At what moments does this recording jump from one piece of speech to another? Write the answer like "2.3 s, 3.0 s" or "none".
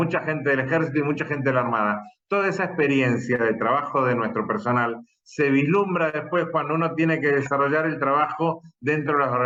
none

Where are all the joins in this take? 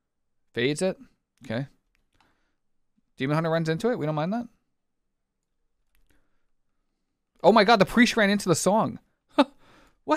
none

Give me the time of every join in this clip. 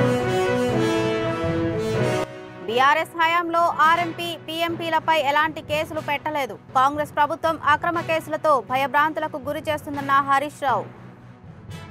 none

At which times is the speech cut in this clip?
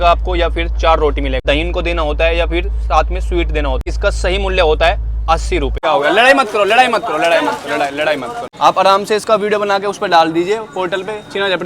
1.4 s, 3.8 s, 5.8 s, 8.4 s

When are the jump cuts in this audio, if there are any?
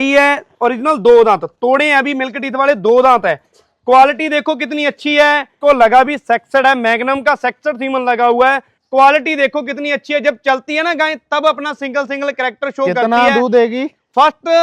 5.6 s, 8.7 s

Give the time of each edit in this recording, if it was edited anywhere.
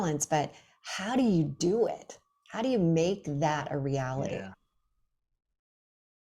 none

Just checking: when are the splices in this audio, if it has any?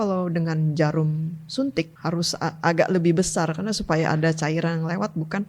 1.9 s

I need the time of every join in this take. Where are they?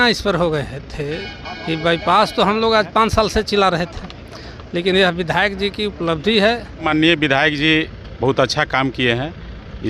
6.9 s

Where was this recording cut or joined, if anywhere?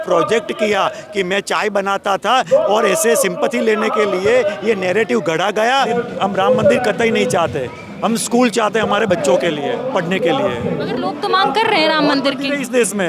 5.9 s

